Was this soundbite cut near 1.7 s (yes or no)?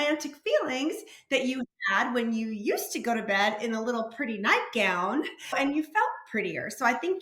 no